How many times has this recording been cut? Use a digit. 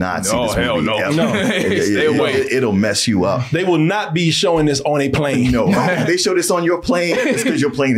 1